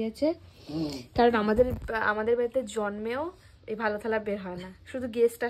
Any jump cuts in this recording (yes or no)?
no